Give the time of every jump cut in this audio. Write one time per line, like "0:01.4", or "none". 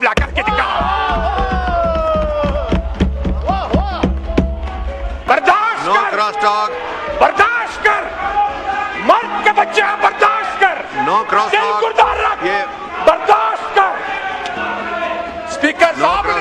0:05.3